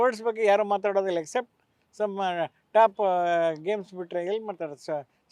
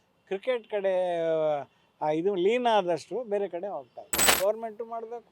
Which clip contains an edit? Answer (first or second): second